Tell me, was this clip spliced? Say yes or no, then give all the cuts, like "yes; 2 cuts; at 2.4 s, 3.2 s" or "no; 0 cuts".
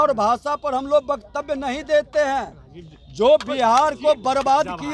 no; 0 cuts